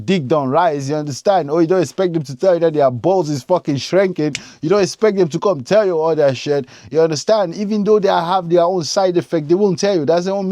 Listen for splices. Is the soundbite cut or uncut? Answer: uncut